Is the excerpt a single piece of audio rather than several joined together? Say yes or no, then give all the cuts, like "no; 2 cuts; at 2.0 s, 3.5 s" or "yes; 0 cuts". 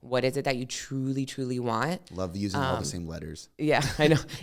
yes; 0 cuts